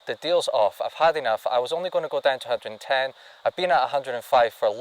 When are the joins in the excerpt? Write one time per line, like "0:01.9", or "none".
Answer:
none